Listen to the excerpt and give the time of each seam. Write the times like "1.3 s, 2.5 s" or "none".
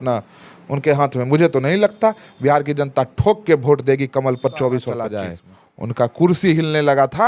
5.1 s